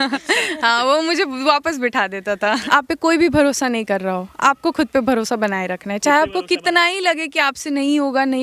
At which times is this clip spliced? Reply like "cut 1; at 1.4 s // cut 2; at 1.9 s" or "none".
cut 1; at 2.6 s